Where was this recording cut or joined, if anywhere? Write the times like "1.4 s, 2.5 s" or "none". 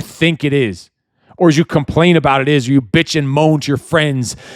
none